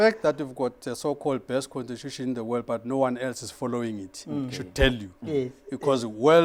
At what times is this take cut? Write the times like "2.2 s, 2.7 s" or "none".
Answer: none